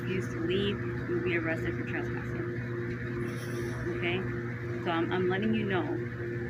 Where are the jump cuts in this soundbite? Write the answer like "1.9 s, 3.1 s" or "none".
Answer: none